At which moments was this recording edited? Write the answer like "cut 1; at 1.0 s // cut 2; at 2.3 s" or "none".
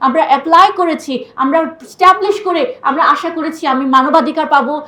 none